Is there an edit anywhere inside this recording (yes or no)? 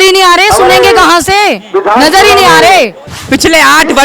yes